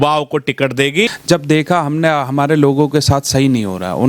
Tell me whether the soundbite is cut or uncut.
cut